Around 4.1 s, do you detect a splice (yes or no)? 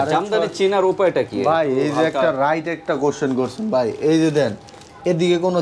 no